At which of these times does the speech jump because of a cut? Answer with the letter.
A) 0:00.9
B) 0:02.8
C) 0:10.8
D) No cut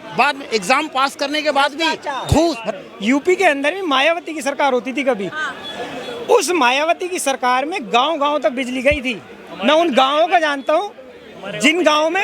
B